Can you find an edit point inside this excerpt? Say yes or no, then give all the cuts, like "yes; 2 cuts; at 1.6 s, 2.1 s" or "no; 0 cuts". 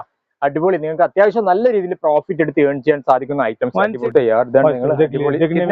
yes; 1 cut; at 4.0 s